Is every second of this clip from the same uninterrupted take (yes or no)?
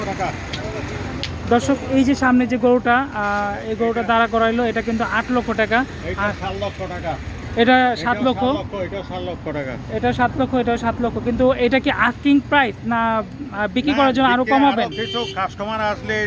yes